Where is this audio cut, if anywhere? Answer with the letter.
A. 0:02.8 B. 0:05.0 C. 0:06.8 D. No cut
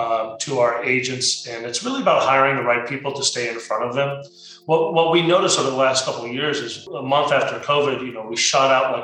C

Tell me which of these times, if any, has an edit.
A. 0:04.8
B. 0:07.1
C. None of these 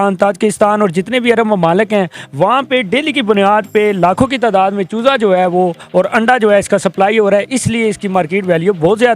C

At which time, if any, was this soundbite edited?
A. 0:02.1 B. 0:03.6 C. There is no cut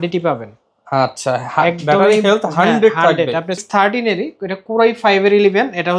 B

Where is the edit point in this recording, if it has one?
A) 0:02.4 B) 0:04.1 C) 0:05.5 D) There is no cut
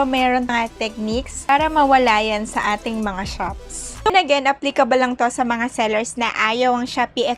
B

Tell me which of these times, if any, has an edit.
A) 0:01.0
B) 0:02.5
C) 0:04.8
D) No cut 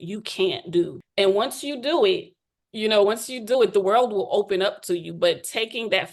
A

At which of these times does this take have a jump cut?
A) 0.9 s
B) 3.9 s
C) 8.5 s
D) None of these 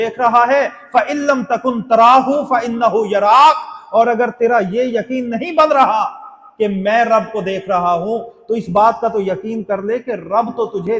D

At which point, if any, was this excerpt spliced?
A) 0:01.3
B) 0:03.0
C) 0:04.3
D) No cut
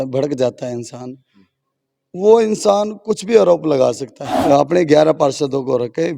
C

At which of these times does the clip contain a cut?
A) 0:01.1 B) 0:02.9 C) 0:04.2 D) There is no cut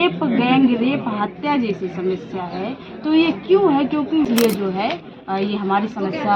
C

